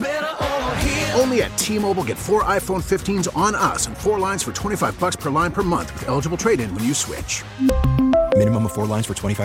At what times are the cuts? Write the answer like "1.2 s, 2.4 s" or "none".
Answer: none